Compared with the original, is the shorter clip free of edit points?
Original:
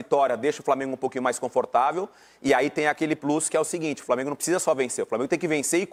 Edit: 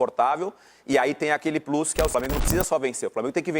no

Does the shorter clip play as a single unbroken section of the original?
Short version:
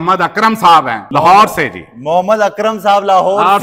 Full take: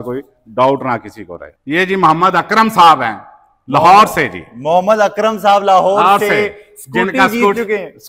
no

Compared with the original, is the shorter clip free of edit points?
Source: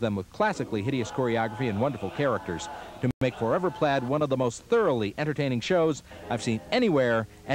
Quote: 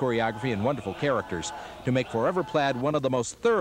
no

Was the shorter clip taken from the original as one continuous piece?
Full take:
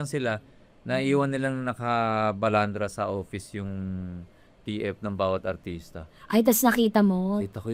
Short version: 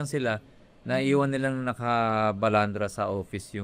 yes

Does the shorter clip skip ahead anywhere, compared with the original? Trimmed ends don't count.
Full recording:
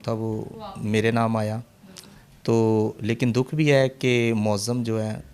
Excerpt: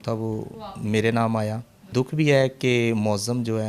yes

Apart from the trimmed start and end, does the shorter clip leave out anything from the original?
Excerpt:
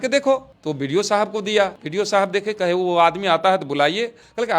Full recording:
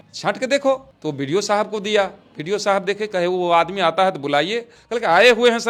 yes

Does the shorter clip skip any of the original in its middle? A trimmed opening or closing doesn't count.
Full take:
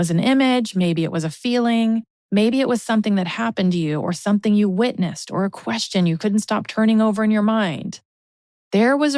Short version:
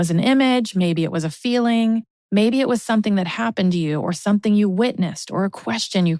no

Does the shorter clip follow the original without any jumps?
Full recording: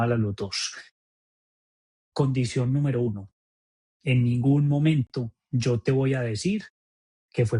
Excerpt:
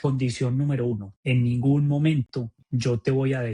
no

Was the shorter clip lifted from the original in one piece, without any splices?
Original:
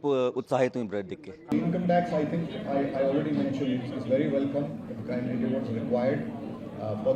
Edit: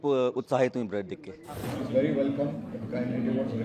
no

